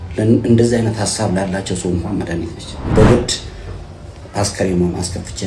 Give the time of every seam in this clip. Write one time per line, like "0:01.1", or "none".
0:02.7